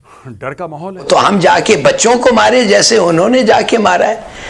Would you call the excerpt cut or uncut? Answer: cut